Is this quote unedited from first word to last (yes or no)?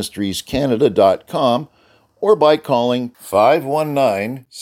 yes